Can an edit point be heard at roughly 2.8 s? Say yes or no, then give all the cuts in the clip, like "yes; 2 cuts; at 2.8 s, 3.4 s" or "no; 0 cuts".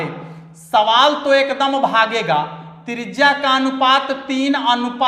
no; 0 cuts